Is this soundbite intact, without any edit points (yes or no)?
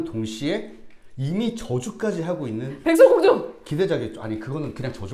yes